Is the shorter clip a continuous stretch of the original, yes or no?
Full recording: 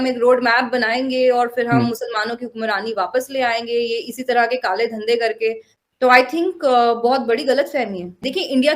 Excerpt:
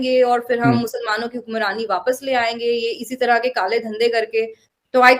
yes